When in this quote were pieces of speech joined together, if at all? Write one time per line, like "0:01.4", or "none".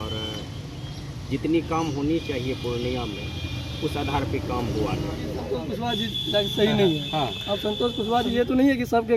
0:05.3